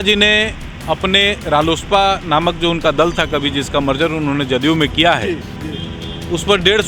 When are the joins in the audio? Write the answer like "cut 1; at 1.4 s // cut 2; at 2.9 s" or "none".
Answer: none